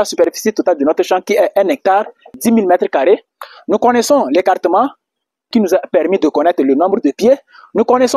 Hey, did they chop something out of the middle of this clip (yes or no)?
yes